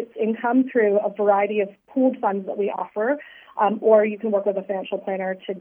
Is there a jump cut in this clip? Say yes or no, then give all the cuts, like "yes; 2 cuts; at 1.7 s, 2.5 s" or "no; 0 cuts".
no; 0 cuts